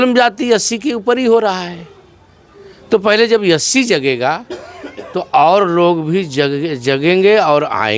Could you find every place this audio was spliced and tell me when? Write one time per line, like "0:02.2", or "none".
none